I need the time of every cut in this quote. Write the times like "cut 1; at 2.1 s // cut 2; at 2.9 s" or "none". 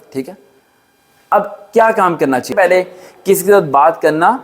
cut 1; at 2.5 s